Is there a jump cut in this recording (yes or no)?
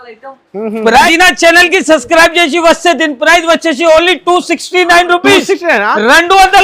yes